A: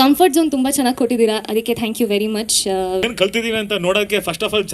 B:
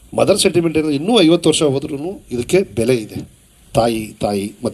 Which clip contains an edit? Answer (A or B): A